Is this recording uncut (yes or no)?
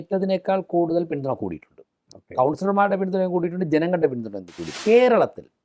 no